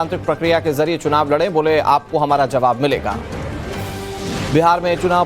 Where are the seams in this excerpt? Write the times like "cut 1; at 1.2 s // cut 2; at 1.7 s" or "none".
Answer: cut 1; at 3.4 s

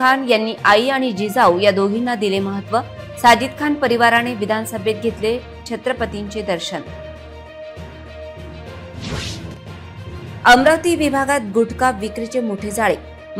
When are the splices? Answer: cut 1; at 9.6 s

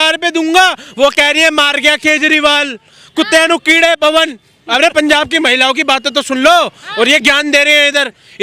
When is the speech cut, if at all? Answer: none

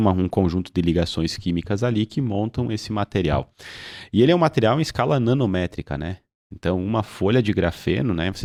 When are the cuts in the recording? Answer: none

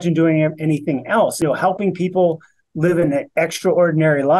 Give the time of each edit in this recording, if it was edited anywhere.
cut 1; at 1.4 s

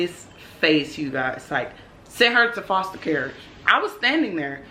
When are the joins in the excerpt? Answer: none

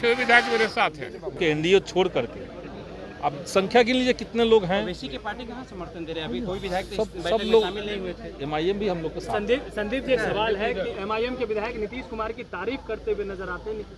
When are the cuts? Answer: cut 1; at 1.4 s

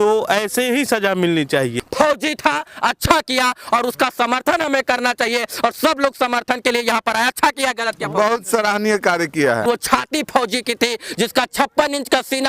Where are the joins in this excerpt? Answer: cut 1; at 1.8 s // cut 2; at 9.6 s

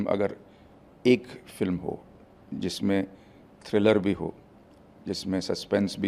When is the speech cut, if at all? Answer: none

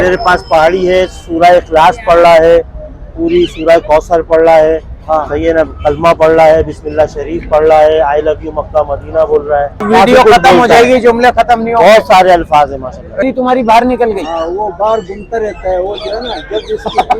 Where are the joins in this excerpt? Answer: cut 1; at 9.9 s // cut 2; at 13.3 s

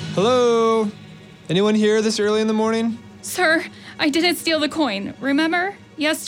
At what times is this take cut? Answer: cut 1; at 3.1 s

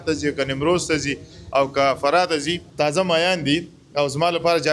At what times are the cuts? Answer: cut 1; at 2.6 s

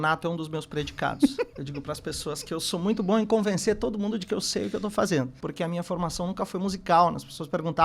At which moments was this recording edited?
cut 1; at 1.5 s // cut 2; at 5.4 s

